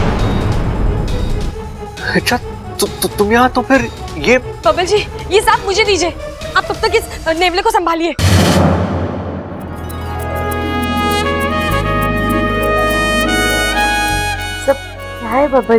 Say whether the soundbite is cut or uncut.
uncut